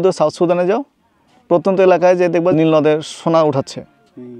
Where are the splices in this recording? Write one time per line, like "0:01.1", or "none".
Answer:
0:02.5